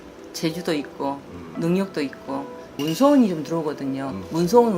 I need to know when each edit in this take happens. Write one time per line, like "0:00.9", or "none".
0:02.8